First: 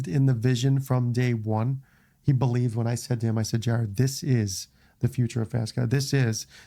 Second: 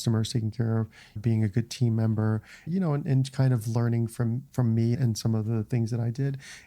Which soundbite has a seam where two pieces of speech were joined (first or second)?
second